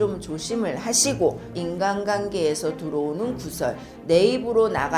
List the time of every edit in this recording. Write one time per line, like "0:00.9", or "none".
0:01.5